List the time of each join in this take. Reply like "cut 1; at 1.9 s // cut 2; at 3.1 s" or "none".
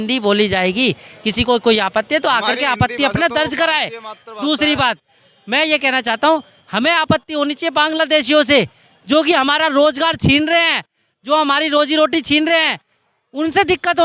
none